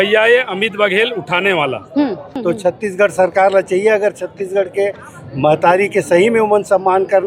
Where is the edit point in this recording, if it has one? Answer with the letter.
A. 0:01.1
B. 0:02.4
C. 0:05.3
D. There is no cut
B